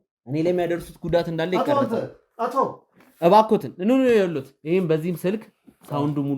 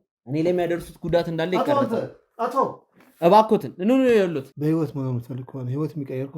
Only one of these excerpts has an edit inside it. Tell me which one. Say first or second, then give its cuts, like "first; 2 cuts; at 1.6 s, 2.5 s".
second; 1 cut; at 4.5 s